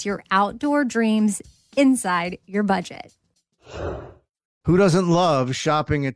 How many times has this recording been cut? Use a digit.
1